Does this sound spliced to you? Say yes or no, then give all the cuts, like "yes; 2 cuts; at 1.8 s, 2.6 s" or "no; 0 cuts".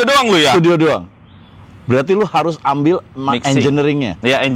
no; 0 cuts